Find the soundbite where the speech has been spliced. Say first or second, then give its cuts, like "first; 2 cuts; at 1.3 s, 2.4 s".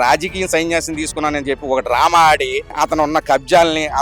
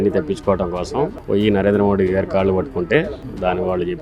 first; 1 cut; at 2.7 s